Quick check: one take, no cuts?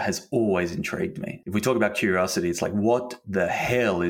no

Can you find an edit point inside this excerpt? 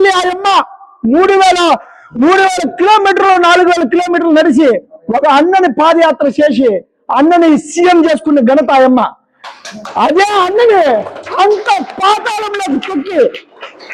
no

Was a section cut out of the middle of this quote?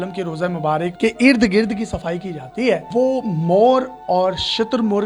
yes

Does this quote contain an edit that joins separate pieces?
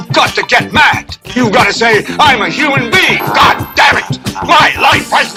no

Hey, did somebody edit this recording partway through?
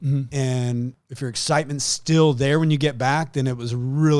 yes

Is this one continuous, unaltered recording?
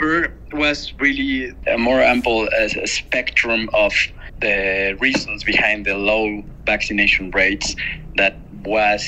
no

